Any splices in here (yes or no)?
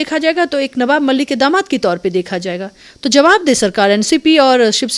no